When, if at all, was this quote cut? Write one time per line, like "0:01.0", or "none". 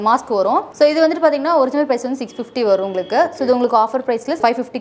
none

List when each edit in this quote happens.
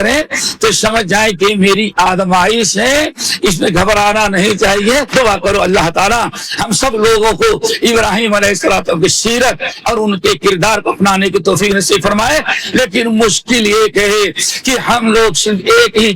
0:05.1

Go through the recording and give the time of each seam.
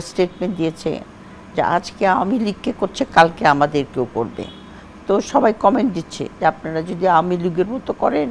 none

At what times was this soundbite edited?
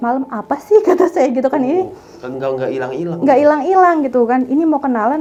none

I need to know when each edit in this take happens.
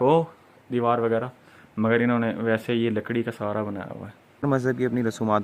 0:04.4

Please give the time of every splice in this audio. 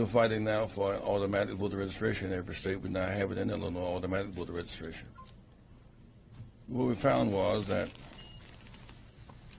0:05.6

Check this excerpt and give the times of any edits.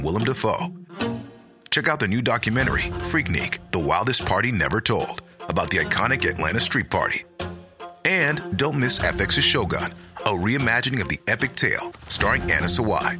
none

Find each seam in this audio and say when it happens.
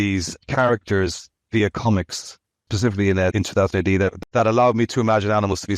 0:02.7
0:03.3
0:04.2

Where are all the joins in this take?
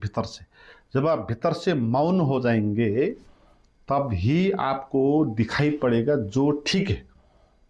none

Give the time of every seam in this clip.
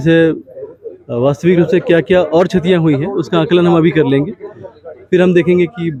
none

